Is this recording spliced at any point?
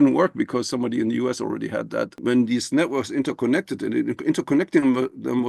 yes; 1 cut; at 2.2 s

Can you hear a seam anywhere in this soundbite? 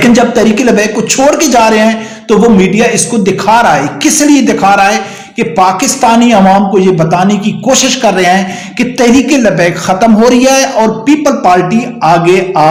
no; 0 cuts

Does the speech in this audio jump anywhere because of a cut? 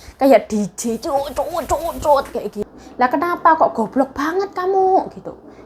yes; 1 cut; at 2.6 s

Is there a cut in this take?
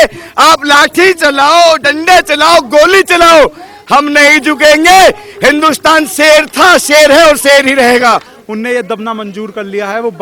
yes; 1 cut; at 8.3 s

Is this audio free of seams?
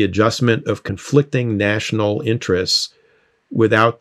no; 1 cut; at 0.9 s

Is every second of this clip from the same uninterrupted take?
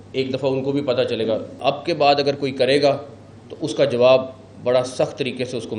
no; 1 cut; at 1.5 s

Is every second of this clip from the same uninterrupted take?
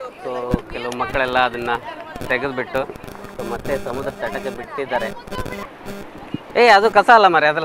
no; 1 cut; at 5.7 s

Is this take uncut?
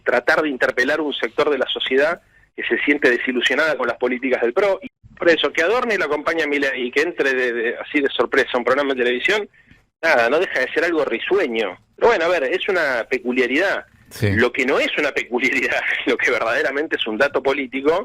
no; 2 cuts; at 4.8 s, 11.8 s

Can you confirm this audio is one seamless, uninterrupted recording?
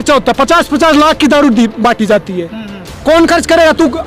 yes; 0 cuts

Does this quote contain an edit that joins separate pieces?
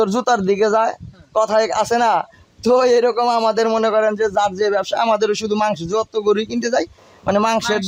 no; 0 cuts

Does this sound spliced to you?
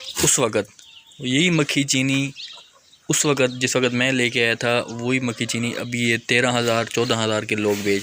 no; 0 cuts

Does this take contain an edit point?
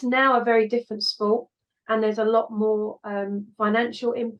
no; 0 cuts

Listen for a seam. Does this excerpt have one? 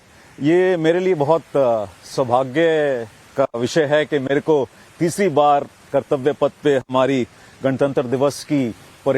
yes; 1 cut; at 2.9 s

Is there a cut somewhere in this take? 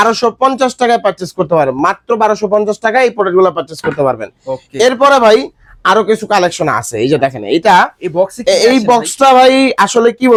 no; 0 cuts

